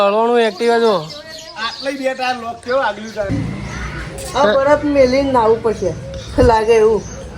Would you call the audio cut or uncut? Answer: cut